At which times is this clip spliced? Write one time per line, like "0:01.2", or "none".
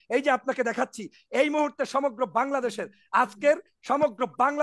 none